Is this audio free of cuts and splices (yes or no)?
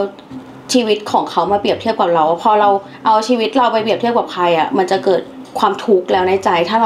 no